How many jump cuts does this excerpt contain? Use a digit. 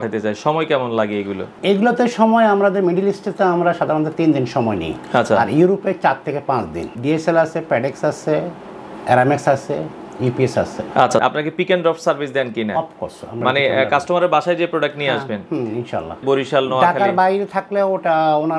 4